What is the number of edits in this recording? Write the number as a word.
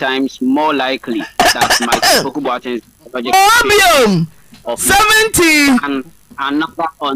zero